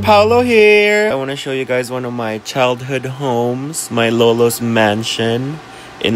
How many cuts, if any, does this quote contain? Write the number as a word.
one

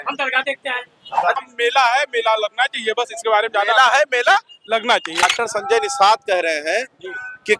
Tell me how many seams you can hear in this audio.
two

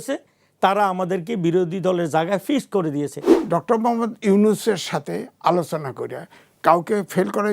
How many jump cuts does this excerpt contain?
one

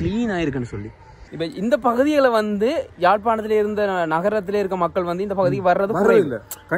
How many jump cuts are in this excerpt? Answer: one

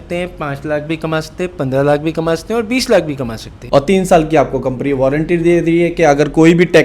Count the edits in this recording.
one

